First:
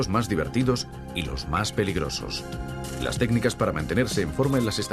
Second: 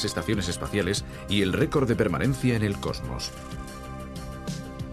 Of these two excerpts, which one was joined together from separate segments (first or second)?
second